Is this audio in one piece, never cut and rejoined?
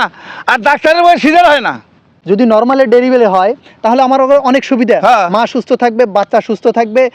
no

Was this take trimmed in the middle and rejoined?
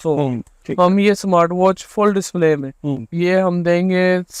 no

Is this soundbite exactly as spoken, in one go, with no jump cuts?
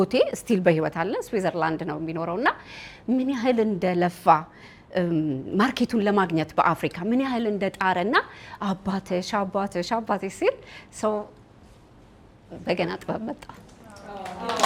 yes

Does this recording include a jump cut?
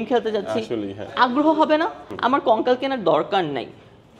yes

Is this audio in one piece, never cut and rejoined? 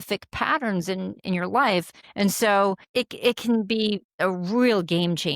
no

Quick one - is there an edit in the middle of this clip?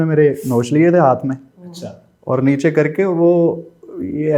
no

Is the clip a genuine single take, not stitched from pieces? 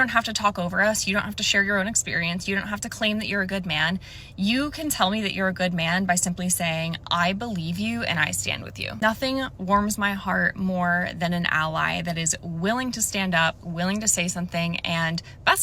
no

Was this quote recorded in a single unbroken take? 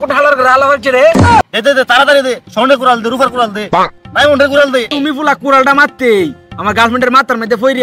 no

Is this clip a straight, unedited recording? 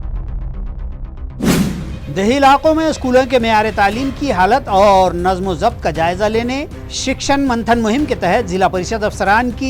no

